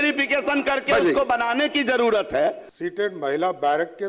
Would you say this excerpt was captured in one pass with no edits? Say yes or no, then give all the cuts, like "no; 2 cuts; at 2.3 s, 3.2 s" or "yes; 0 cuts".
no; 1 cut; at 2.7 s